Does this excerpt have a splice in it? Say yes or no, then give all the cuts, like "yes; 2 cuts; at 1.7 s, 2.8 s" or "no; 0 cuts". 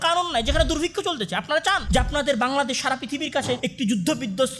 yes; 2 cuts; at 1.8 s, 3.7 s